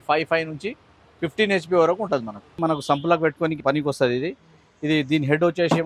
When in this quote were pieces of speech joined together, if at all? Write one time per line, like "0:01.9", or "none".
0:02.6
0:03.6